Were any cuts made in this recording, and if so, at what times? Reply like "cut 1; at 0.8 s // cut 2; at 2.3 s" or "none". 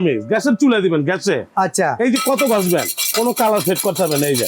none